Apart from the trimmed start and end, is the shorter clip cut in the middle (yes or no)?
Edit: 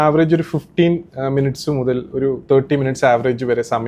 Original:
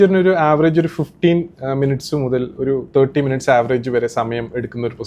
no